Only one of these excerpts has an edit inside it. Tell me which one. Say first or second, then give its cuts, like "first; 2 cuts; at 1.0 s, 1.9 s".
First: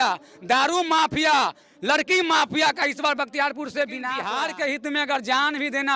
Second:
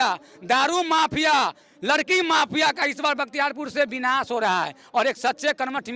first; 1 cut; at 4.2 s